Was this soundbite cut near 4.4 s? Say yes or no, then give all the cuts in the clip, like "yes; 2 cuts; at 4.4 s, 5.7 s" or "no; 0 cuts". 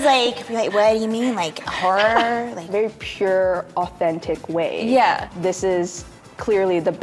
no; 1 cut; at 2.7 s